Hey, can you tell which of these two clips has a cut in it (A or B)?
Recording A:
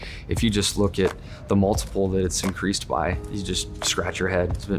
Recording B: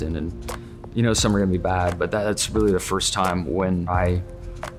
B